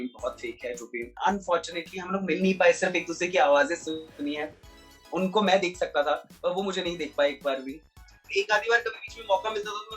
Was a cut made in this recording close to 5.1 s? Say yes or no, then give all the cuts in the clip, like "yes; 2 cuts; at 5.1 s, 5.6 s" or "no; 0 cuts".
no; 2 cuts; at 1.1 s, 8.2 s